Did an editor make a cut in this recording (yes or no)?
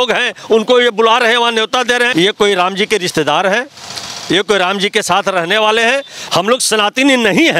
yes